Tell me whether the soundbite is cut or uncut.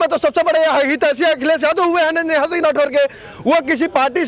uncut